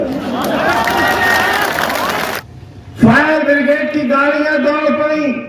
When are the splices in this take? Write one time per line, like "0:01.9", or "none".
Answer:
0:02.4